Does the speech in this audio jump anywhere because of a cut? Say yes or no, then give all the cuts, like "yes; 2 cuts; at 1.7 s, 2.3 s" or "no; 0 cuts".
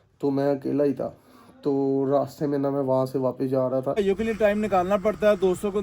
yes; 1 cut; at 4.0 s